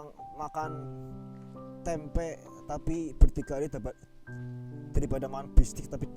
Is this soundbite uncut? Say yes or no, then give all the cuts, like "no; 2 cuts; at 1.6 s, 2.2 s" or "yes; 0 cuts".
yes; 0 cuts